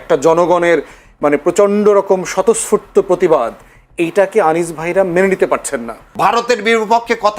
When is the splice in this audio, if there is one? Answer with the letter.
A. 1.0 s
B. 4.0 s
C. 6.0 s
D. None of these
C